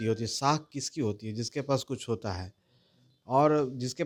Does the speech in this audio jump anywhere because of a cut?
no; 0 cuts

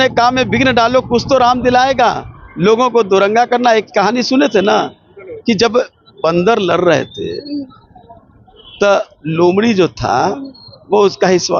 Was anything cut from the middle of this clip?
no; 0 cuts

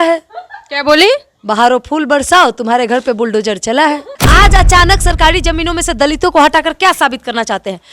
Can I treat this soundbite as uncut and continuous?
no; 1 cut; at 4.1 s

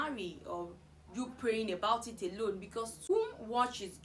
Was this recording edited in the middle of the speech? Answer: yes; 1 cut; at 3.1 s

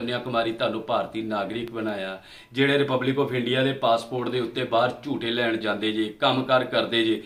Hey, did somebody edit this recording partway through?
no; 0 cuts

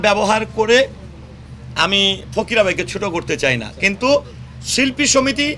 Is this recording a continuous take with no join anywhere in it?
yes; 0 cuts

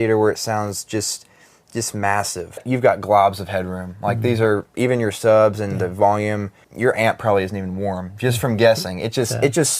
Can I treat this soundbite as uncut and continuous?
no; 2 cuts; at 2.6 s, 6.6 s

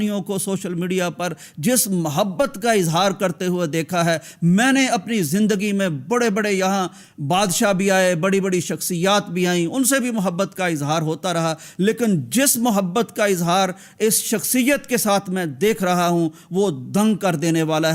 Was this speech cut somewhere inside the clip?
no; 0 cuts

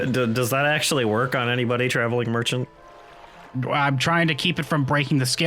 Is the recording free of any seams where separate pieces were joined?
yes; 0 cuts

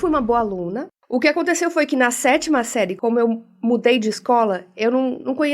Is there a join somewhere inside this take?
yes; 2 cuts; at 0.9 s, 2.9 s

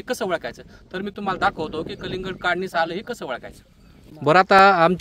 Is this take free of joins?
no; 1 cut; at 4.1 s

